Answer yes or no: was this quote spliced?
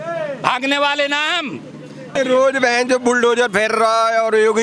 yes